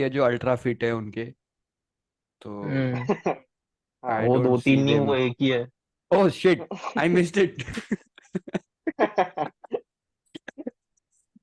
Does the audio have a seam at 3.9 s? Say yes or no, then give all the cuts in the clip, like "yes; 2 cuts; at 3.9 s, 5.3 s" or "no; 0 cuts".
no; 0 cuts